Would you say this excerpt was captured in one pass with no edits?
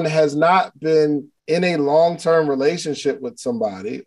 no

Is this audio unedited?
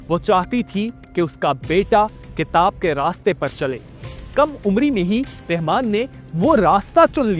no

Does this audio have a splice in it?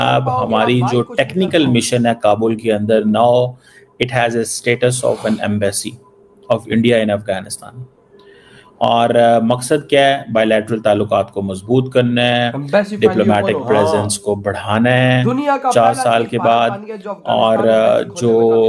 no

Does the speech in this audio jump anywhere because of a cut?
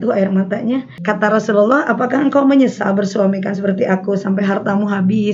yes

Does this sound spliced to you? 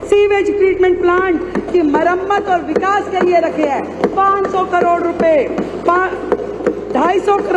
no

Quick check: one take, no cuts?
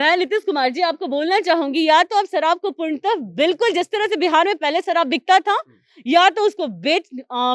yes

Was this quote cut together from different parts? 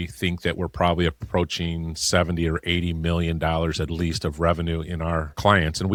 no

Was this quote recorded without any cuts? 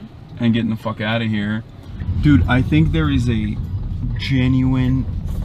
no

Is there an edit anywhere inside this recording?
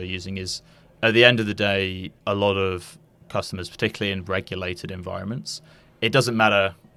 no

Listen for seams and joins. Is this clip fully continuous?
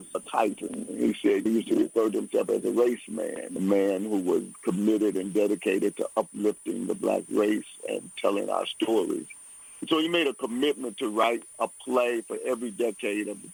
yes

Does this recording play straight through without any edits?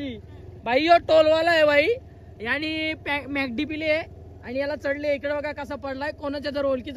yes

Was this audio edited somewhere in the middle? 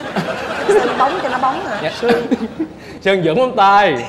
no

